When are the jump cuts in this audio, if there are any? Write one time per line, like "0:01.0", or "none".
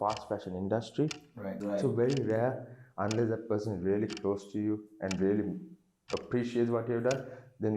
0:01.6